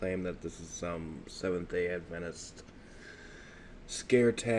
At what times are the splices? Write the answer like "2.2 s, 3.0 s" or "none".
none